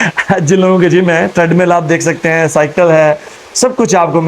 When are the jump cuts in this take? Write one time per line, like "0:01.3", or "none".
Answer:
none